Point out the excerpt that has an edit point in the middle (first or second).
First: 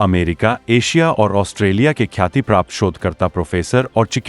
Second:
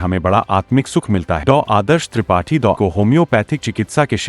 second